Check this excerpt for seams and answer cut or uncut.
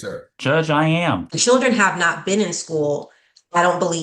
cut